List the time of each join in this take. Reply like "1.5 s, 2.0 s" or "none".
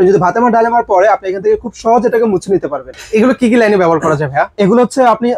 2.9 s